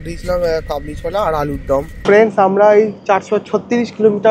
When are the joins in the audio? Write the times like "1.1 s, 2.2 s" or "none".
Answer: 1.9 s